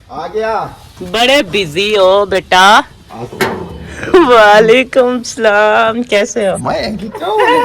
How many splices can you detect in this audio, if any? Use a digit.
0